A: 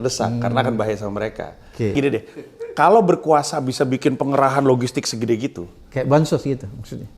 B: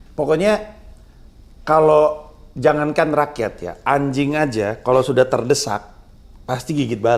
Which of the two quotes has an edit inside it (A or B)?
A